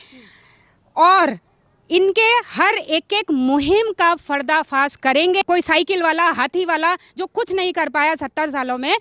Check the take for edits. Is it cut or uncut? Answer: cut